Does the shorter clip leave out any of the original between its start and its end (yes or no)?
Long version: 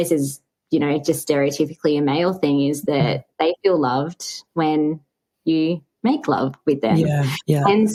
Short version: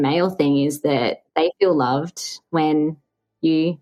no